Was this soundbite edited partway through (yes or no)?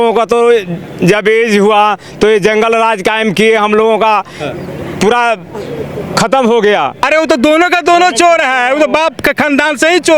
yes